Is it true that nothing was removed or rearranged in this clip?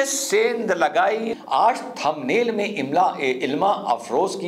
no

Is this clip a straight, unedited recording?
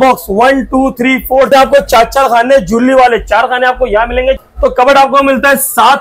no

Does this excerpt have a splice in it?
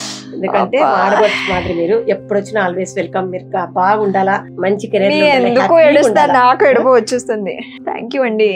no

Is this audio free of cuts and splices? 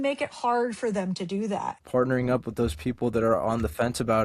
no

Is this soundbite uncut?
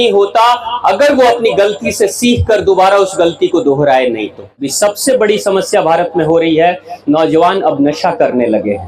no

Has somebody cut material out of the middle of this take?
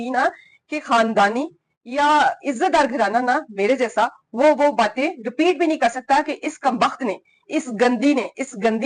no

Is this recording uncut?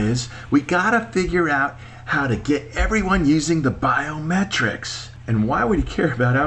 yes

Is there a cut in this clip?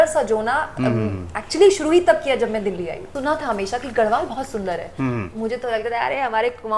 yes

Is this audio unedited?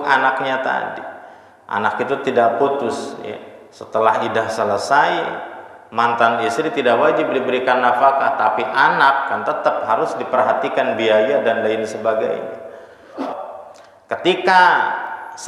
no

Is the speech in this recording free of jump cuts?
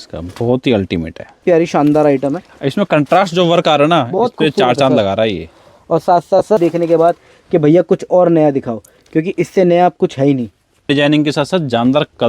no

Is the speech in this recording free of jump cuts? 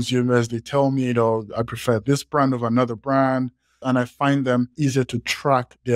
no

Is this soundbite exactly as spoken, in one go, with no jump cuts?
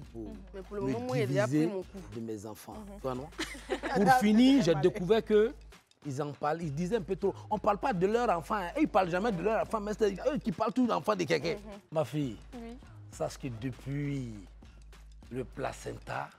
no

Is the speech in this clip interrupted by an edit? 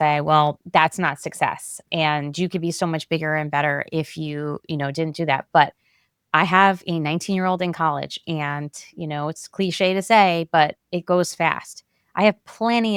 no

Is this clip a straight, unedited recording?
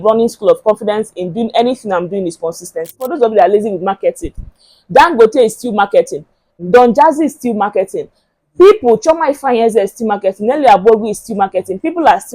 no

